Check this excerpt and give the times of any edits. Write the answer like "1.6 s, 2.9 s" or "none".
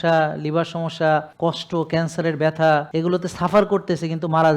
1.3 s, 2.9 s